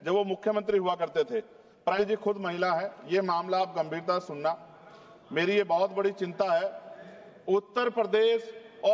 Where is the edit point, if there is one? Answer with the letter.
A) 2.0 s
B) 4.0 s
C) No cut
A